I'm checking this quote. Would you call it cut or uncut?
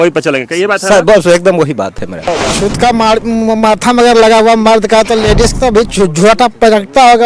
cut